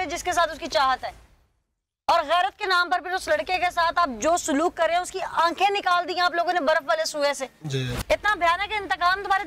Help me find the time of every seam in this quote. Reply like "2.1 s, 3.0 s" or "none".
7.9 s